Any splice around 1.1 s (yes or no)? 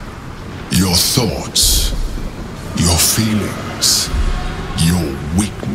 no